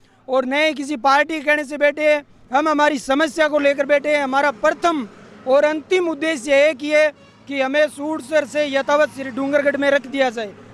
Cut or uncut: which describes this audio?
uncut